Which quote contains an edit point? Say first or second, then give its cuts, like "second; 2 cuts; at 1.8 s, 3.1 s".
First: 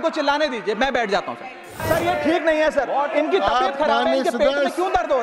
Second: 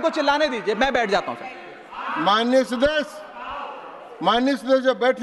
first; 1 cut; at 1.8 s